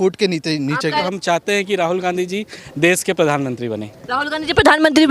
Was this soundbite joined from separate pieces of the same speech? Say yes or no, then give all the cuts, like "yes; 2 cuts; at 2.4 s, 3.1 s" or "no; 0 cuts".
yes; 1 cut; at 1.0 s